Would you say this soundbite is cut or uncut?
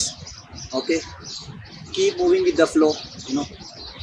uncut